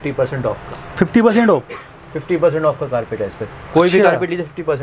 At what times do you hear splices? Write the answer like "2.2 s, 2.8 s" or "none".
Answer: none